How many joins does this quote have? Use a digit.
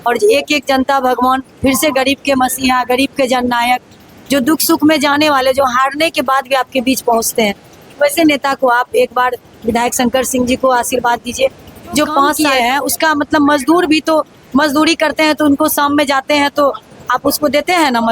1